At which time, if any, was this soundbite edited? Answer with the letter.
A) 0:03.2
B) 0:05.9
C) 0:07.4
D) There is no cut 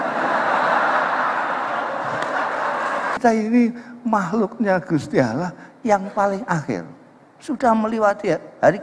A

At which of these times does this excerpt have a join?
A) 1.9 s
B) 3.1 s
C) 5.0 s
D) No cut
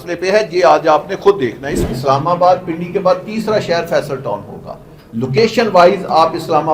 A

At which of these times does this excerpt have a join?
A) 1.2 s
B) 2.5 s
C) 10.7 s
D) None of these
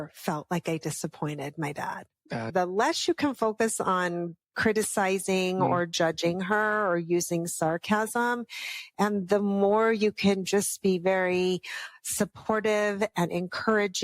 B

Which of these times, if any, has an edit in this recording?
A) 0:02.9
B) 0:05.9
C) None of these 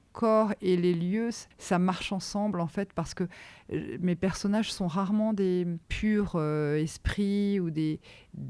B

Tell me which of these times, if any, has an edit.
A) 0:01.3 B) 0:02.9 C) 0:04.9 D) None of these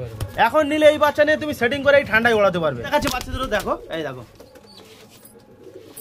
B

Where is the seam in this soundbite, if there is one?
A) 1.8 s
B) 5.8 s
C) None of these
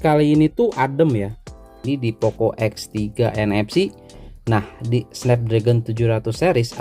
A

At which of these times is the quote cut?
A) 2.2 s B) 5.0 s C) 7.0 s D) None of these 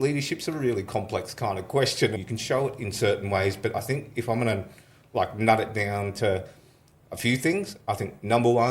A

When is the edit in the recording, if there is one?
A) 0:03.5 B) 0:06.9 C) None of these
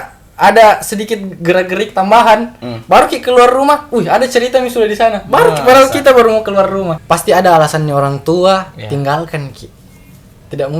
B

